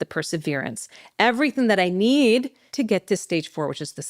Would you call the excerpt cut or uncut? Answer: cut